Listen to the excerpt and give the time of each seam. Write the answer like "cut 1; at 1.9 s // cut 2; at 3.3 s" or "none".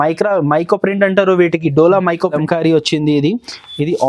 cut 1; at 2.3 s